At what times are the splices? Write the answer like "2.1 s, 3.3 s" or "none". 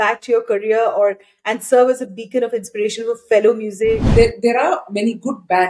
4.1 s

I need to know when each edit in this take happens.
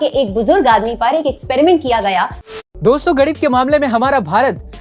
2.4 s

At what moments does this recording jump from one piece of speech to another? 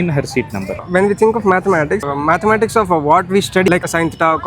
0.8 s, 2.1 s, 3.7 s

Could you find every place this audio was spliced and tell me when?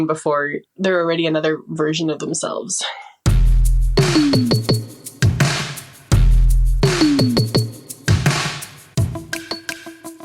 3.0 s

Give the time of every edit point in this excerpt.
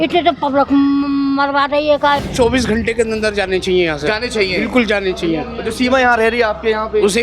2.3 s

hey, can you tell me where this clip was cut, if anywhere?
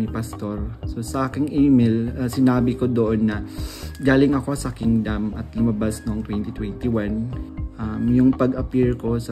7.4 s

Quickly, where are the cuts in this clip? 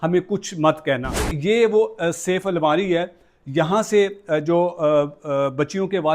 1.3 s

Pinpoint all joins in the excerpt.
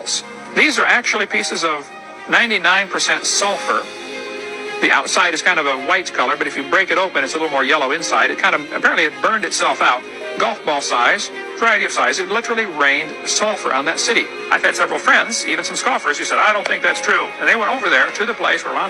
4.5 s

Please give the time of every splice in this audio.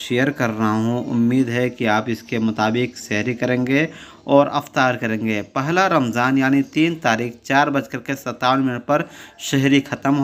none

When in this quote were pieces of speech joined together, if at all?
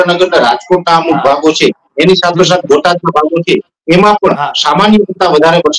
none

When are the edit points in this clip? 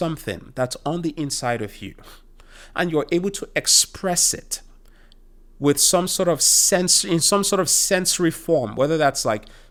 none

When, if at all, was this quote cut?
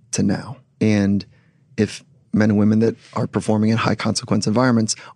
2.3 s

